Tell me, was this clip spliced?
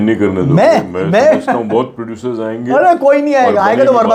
no; 0 cuts

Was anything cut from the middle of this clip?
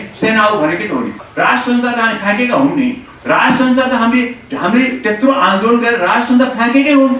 yes; 1 cut; at 1.2 s

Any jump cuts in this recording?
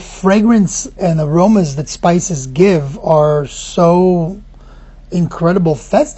yes; 1 cut; at 0.9 s

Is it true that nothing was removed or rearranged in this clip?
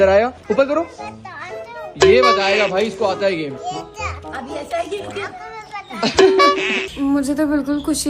no; 1 cut; at 6.9 s

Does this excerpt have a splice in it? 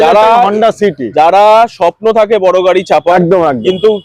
no; 0 cuts

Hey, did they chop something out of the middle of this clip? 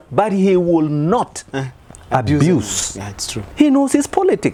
no; 0 cuts

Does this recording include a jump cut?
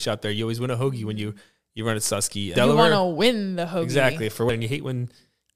yes; 2 cuts; at 2.5 s, 4.5 s

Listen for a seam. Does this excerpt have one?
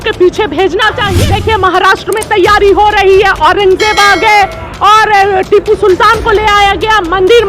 yes; 1 cut; at 1.0 s

